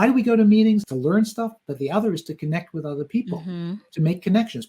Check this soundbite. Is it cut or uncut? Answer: cut